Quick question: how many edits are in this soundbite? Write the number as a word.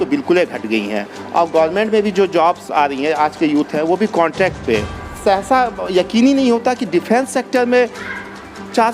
one